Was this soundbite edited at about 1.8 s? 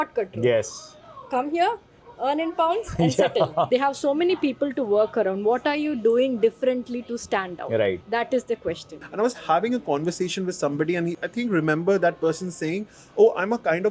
no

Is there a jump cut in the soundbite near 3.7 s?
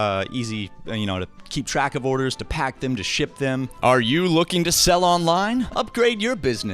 yes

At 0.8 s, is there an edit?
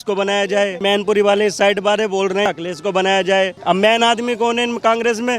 yes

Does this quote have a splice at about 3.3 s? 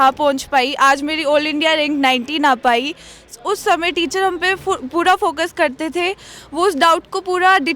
yes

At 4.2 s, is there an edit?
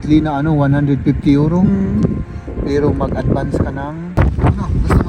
yes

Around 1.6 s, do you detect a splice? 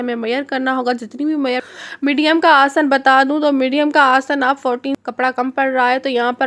yes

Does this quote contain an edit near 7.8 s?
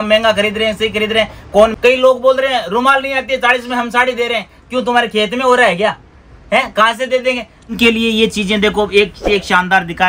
yes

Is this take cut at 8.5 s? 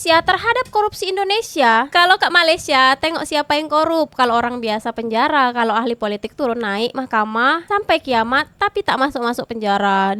no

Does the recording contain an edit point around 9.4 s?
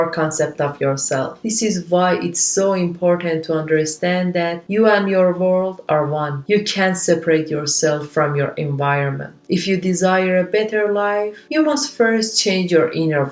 no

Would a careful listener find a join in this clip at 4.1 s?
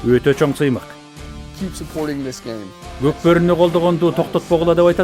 no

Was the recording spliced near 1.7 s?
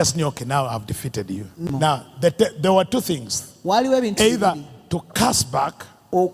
yes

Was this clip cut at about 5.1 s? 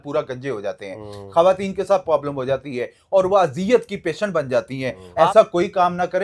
yes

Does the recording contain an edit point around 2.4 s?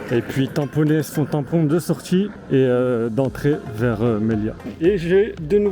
yes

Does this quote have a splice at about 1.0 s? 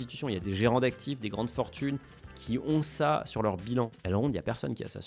no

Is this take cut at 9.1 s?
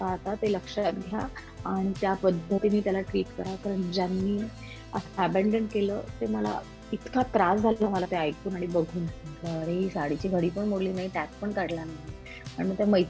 yes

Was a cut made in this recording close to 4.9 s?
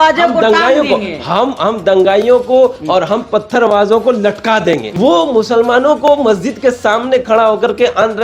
yes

